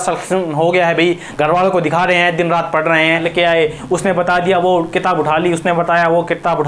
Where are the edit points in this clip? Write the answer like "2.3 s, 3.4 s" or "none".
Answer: 3.3 s